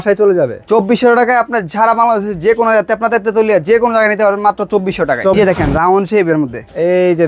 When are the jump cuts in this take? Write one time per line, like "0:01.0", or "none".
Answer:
0:05.4